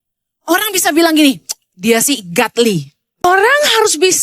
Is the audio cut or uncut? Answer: cut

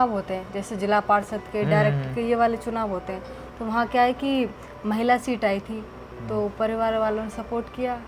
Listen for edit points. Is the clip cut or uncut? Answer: uncut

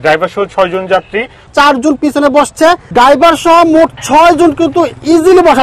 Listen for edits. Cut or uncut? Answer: cut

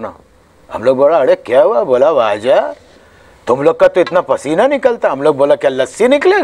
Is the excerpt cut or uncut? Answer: uncut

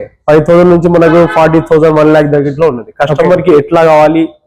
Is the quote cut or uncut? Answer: uncut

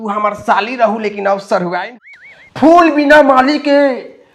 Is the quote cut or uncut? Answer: cut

